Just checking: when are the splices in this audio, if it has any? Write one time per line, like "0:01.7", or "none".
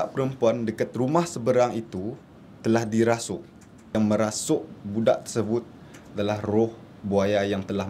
0:03.9